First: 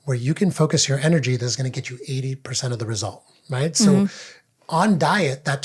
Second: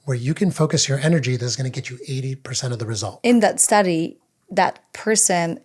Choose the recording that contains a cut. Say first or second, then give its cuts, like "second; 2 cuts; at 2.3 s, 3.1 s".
second; 1 cut; at 3.2 s